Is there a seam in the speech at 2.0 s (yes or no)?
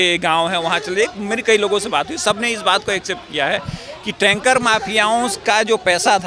no